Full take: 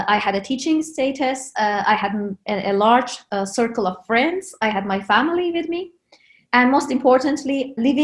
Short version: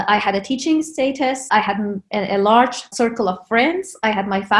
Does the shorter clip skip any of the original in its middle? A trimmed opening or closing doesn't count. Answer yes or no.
yes